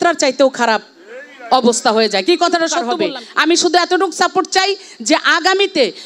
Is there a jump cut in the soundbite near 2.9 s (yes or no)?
yes